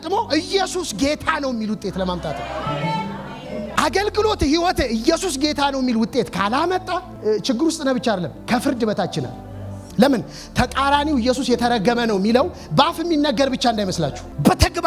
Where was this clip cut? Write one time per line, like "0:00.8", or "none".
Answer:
none